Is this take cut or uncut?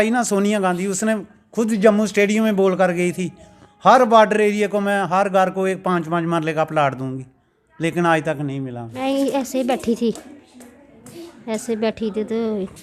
cut